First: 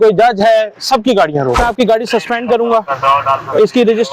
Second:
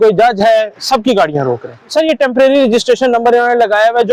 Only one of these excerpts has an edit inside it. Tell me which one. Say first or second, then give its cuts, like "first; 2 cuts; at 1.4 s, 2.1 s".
first; 1 cut; at 1.6 s